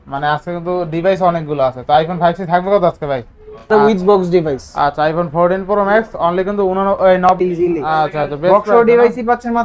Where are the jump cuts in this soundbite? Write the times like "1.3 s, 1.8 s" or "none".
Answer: 3.7 s, 7.4 s